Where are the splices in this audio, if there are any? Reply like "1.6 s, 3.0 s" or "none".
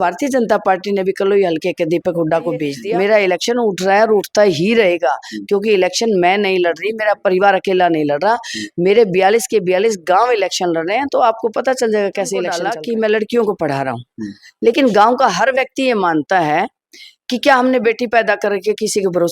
2.8 s, 12.6 s